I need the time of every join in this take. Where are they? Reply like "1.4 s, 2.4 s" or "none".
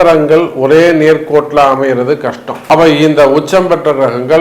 2.5 s